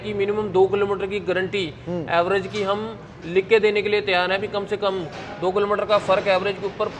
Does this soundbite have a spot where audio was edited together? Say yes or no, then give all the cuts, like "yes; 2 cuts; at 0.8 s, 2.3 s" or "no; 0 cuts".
no; 0 cuts